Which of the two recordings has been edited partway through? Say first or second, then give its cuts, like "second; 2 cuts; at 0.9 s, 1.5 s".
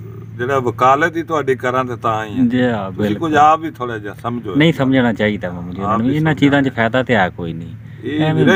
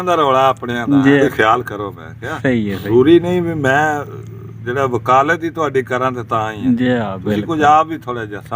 second; 2 cuts; at 1.2 s, 2.9 s